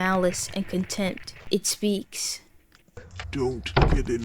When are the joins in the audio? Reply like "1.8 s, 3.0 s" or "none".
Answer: 1.3 s, 3.2 s